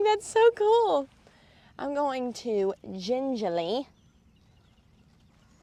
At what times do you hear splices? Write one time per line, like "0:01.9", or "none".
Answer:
none